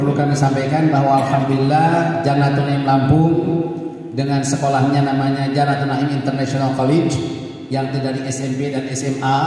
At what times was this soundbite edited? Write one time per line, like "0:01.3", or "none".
none